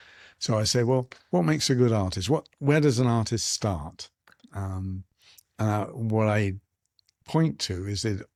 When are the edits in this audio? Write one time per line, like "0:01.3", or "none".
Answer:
none

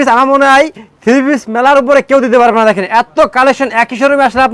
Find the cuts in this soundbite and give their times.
none

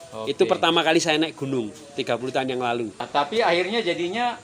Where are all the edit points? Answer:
0:03.1

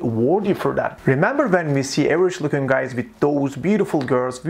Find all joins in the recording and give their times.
none

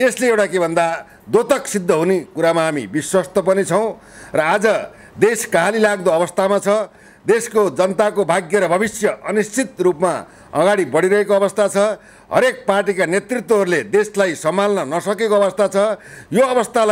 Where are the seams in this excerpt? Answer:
none

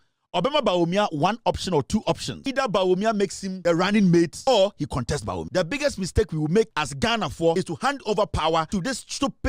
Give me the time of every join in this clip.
0:02.3
0:03.5
0:04.4
0:05.5
0:07.3
0:08.7

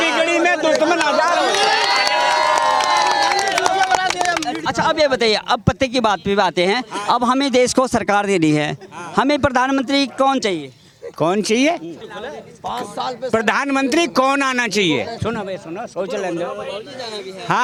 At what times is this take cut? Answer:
none

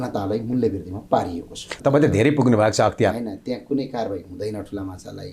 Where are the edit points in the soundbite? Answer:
0:01.6

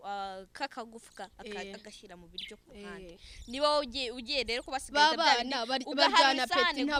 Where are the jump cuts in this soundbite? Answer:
none

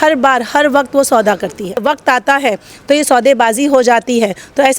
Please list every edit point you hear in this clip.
0:01.8

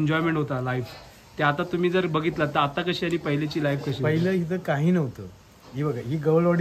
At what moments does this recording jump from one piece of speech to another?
none

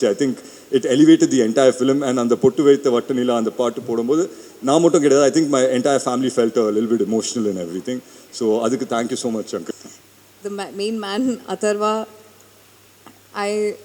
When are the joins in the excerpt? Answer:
0:09.7

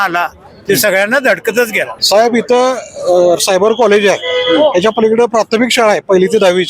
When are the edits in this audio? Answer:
0:01.9

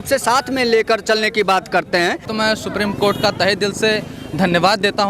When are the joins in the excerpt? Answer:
0:02.3

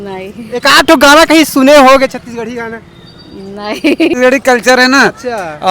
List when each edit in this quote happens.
0:04.1

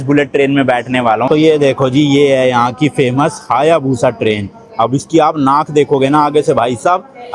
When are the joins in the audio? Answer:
0:01.3

